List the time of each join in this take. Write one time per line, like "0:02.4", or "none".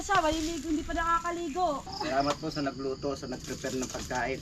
0:01.8